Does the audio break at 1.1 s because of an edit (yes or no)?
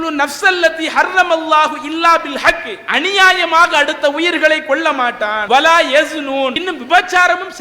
no